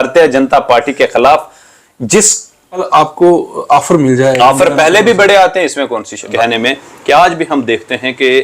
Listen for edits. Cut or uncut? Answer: cut